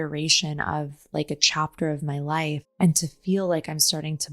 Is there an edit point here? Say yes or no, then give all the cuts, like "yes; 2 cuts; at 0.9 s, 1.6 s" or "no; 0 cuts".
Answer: yes; 1 cut; at 2.7 s